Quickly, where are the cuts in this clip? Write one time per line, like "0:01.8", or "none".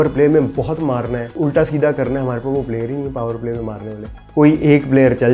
0:01.3
0:04.2